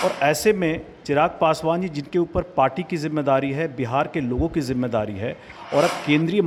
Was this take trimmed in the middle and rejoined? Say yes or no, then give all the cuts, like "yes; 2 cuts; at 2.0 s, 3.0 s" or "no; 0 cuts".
no; 0 cuts